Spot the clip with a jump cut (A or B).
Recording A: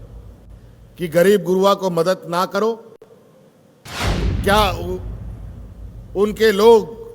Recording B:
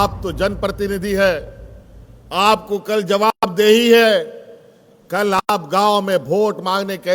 A